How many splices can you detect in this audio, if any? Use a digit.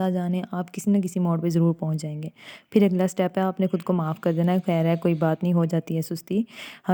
0